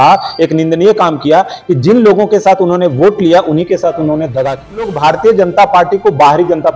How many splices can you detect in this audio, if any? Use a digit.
1